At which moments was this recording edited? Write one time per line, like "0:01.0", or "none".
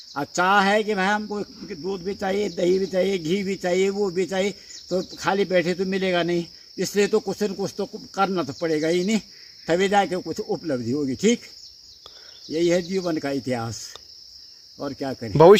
none